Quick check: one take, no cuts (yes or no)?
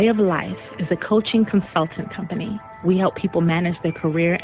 yes